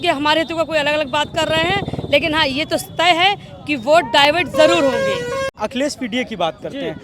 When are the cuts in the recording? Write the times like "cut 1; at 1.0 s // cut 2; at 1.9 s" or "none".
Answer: cut 1; at 5.5 s